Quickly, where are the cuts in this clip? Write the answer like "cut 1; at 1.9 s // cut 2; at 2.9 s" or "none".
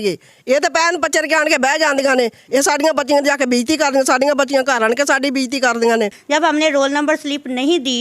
cut 1; at 6.2 s